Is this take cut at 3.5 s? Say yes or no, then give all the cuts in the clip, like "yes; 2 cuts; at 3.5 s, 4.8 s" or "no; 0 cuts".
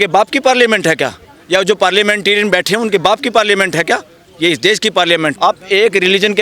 no; 1 cut; at 5.3 s